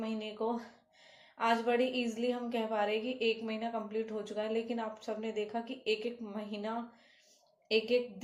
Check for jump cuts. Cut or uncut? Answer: uncut